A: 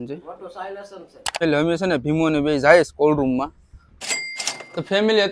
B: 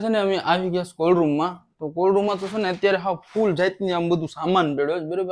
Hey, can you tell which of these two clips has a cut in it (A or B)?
A